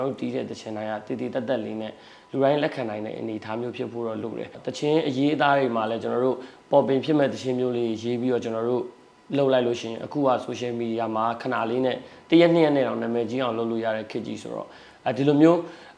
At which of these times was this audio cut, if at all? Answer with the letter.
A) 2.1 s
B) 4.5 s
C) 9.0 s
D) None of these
B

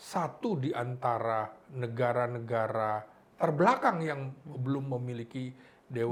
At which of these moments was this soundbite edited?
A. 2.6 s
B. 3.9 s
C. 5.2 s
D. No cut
D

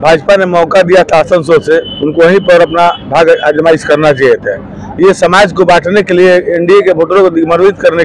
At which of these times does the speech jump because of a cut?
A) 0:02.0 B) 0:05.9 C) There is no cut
C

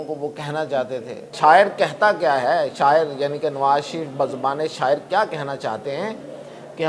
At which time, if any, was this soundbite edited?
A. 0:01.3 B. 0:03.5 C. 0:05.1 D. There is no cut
A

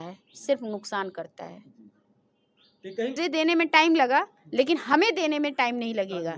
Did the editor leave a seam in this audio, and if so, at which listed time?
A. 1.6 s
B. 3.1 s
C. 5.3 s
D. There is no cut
B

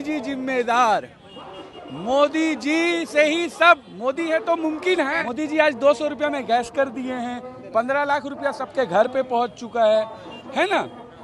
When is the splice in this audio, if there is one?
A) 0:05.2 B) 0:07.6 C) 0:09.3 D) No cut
A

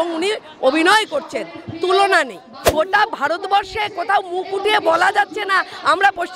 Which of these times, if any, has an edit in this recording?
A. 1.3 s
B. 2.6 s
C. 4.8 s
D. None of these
B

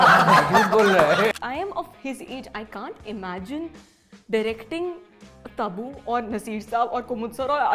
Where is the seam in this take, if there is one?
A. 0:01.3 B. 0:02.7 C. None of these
A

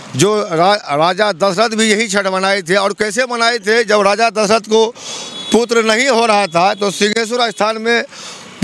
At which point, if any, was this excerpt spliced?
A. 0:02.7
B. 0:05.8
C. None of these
C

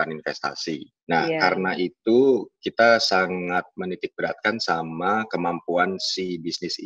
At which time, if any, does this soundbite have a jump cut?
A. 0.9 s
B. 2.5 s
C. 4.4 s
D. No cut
A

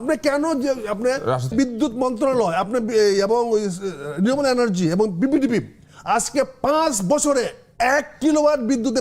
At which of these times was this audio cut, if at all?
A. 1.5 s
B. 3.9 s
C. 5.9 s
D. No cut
A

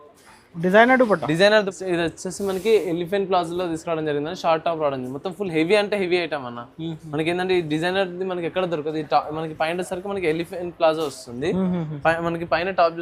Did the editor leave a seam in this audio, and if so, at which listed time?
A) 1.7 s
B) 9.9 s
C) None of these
A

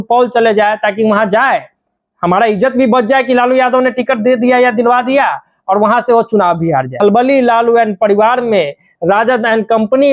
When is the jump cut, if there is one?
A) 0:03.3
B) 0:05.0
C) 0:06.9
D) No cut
C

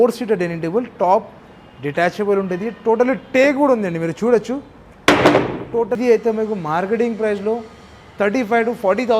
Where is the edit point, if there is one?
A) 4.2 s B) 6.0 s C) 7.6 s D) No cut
B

